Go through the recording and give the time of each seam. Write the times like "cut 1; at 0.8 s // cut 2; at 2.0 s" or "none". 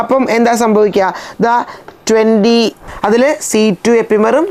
cut 1; at 2.8 s